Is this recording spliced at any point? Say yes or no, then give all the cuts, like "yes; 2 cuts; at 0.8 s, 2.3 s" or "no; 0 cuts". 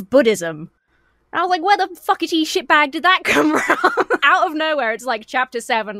yes; 1 cut; at 4.2 s